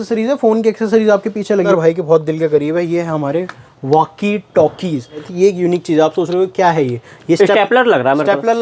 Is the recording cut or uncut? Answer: cut